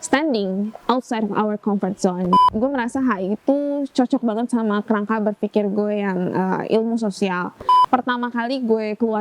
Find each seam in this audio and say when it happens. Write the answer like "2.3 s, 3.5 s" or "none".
2.4 s, 7.8 s